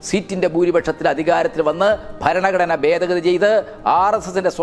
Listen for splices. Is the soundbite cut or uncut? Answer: uncut